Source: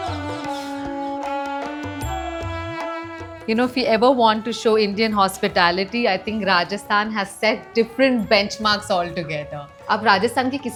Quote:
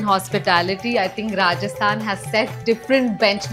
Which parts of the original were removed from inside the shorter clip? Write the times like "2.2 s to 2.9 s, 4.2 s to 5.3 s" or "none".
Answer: none